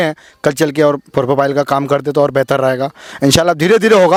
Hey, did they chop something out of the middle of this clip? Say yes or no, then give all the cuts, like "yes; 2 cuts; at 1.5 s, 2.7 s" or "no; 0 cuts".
no; 0 cuts